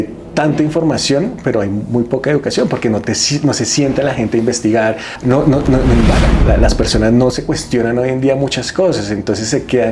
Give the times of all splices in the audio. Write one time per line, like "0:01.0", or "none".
0:05.1